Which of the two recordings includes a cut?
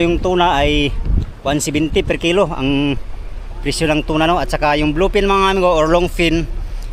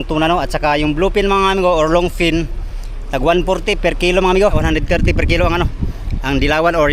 second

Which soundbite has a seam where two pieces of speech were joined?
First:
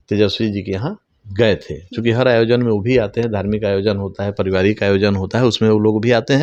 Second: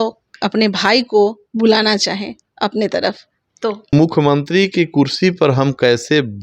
second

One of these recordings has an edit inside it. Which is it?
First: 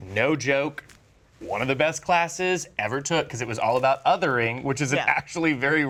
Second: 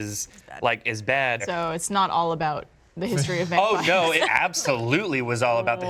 second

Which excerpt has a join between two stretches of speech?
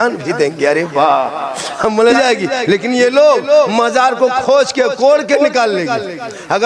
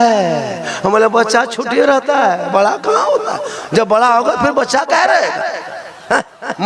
first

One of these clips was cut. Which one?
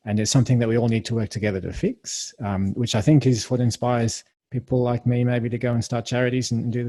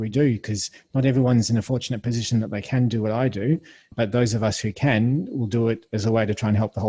second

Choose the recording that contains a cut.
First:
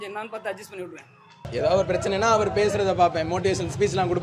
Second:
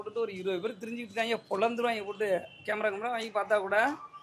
first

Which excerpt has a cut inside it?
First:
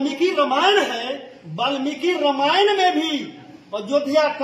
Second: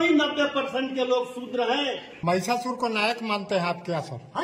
second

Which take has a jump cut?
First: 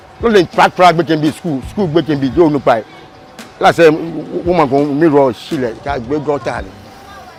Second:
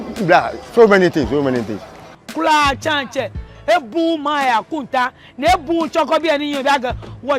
second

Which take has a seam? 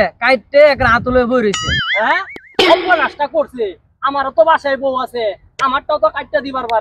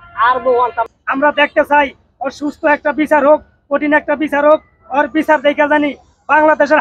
second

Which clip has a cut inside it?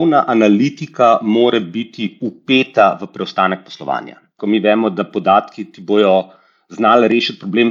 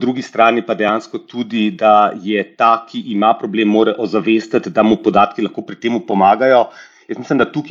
first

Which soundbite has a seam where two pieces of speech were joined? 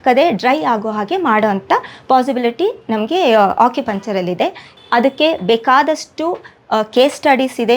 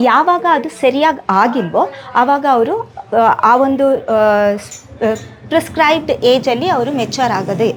first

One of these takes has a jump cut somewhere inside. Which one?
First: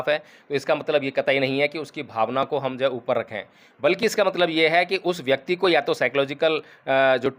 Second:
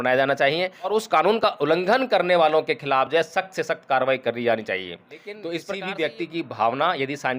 second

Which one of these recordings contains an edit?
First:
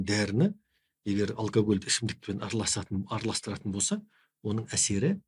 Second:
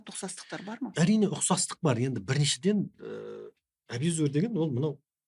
second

